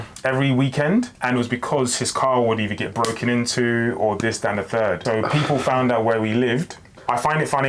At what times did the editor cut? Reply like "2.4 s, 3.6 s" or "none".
1.2 s, 5.0 s, 6.9 s